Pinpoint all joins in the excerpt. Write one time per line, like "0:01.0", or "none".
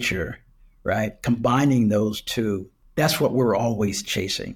0:02.7